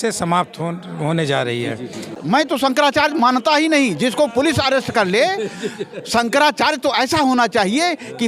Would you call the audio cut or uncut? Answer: cut